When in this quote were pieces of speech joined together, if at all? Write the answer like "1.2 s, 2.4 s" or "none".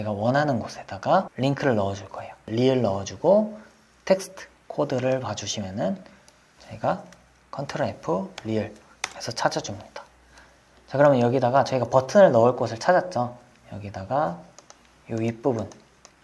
1.3 s, 2.4 s